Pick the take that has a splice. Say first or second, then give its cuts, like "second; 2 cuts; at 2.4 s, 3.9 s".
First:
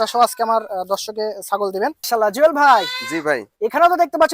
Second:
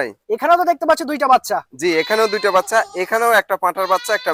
first; 1 cut; at 2.0 s